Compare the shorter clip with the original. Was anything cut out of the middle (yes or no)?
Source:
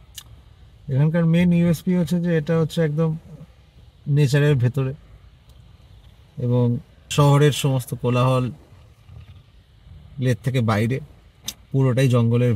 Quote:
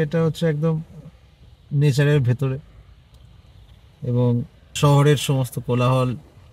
no